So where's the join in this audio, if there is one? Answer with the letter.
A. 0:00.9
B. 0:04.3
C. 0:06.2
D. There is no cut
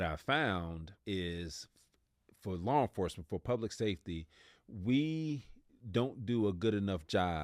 A